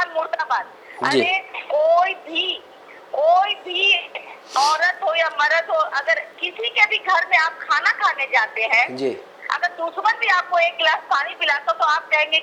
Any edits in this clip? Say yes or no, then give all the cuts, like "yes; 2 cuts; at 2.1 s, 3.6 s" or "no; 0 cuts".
no; 0 cuts